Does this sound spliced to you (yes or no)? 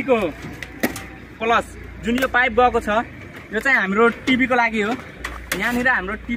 no